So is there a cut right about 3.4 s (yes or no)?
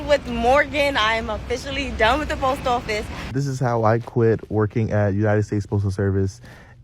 yes